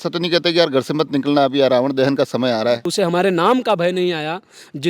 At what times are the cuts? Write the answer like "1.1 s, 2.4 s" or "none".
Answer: 2.9 s